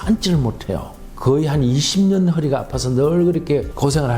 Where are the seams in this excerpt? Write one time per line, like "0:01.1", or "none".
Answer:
0:01.1